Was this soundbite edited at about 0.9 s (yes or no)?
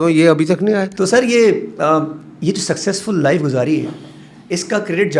yes